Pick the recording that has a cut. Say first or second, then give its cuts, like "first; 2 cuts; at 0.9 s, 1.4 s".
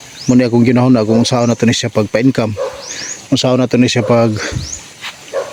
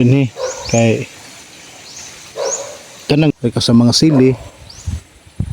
second; 1 cut; at 3.3 s